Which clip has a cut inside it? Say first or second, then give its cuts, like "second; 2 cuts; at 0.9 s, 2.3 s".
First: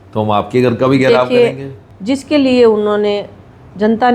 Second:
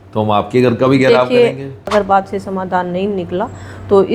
second; 1 cut; at 1.8 s